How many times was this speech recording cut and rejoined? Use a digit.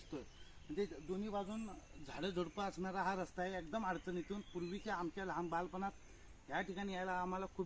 0